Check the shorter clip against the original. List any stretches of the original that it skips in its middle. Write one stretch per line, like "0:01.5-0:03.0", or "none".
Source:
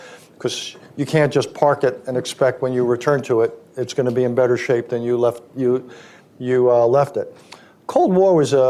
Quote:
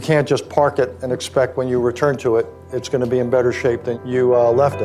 0:05.0-0:06.3